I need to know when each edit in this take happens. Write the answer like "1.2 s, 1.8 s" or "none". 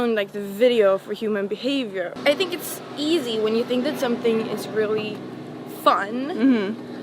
2.1 s